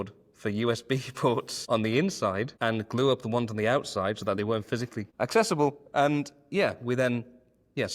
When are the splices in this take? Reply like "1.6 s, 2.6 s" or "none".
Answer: 1.5 s, 2.5 s, 5.0 s